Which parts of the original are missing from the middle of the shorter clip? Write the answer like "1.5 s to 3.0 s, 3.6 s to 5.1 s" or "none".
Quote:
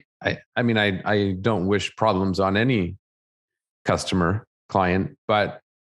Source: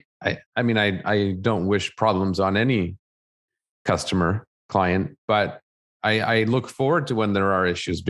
none